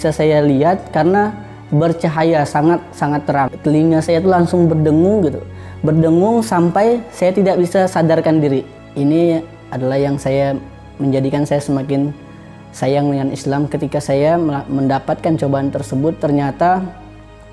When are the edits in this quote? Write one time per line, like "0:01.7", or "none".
0:03.5
0:08.8